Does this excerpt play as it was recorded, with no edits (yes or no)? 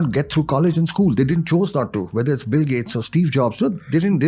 yes